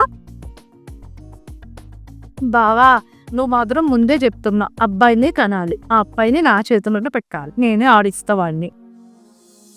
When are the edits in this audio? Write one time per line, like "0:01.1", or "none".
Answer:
none